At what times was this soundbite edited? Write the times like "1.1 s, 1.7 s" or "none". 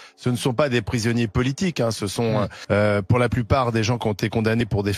none